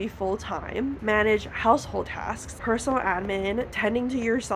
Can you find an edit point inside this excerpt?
yes; 3 cuts; at 1.0 s, 2.5 s, 3.7 s

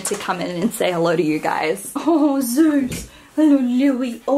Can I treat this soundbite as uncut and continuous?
no; 1 cut; at 1.9 s

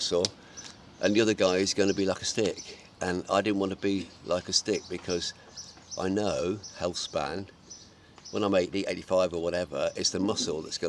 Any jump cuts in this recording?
no; 0 cuts

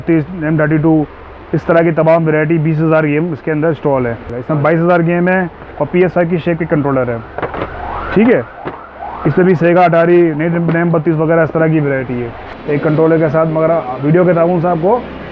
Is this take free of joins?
no; 2 cuts; at 4.3 s, 12.6 s

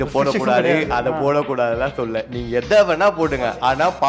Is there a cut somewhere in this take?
no; 0 cuts

